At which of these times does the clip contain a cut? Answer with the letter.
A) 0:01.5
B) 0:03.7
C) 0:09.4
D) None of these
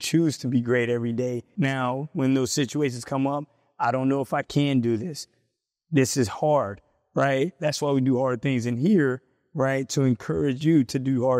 A